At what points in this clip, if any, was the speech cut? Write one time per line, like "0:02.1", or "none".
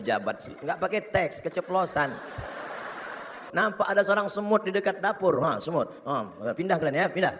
0:03.4

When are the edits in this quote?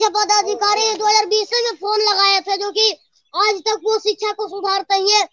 none

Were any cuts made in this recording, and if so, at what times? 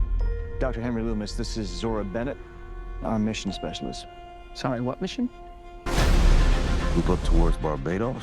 0:05.8

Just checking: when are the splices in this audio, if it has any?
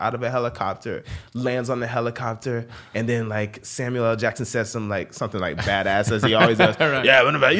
none

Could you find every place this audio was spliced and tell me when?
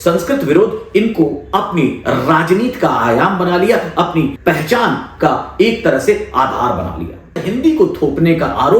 0:04.4
0:07.5

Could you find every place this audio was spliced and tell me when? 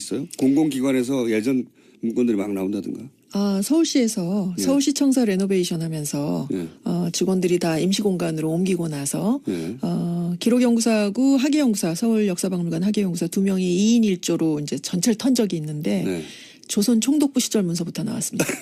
none

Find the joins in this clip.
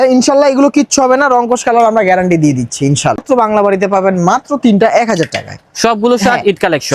0:03.2

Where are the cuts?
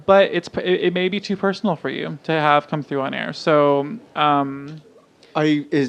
none

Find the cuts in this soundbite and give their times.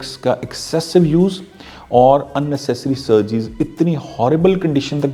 none

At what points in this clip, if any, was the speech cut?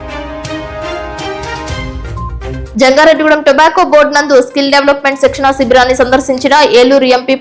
0:01.7

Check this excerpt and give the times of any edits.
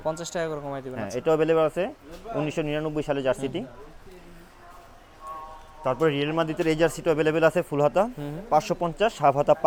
none

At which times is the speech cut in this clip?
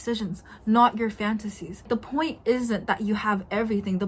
0:01.9

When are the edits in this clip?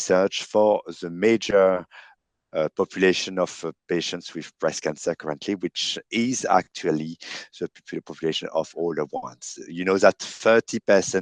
none

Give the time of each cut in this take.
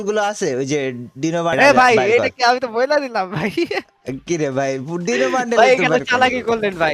0:01.5

